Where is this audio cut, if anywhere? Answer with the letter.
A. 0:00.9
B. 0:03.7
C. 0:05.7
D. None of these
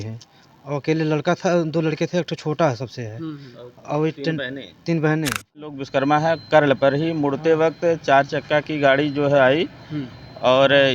C